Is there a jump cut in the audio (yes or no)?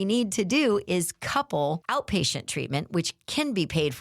yes